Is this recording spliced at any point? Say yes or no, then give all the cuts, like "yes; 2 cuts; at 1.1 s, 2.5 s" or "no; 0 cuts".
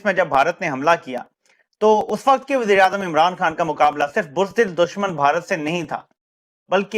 no; 0 cuts